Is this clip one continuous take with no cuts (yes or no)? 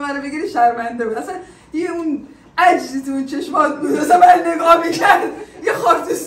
yes